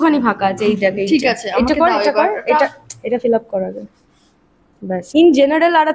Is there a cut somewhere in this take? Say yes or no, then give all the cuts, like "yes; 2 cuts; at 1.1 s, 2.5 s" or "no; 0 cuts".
yes; 1 cut; at 5.0 s